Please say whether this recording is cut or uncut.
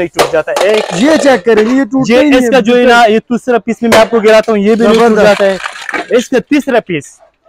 uncut